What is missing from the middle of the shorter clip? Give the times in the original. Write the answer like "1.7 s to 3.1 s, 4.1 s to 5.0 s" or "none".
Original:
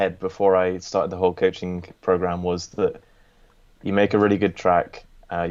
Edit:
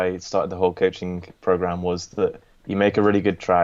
3.1 s to 3.7 s